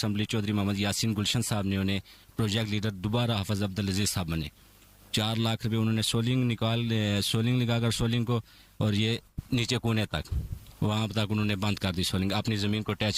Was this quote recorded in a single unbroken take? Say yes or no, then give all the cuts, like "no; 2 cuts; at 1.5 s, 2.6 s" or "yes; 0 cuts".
yes; 0 cuts